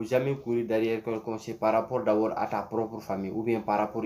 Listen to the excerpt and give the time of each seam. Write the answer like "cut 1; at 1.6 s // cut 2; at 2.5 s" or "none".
none